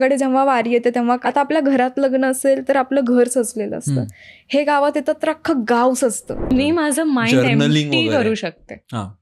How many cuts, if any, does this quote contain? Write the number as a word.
two